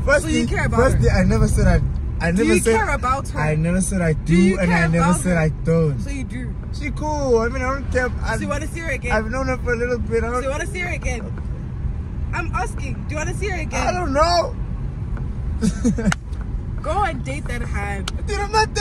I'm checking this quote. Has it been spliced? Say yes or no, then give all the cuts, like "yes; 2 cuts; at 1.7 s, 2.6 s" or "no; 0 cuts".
no; 0 cuts